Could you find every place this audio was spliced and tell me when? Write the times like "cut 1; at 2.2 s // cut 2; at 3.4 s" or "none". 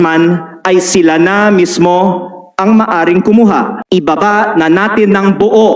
cut 1; at 3.8 s